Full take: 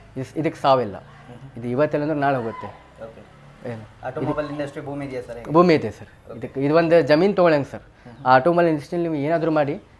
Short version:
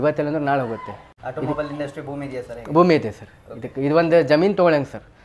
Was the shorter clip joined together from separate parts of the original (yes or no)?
yes